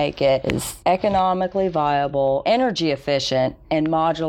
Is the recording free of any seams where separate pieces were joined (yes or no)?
no